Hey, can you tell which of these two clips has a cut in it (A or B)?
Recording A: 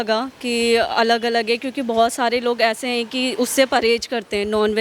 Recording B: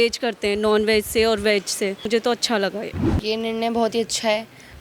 B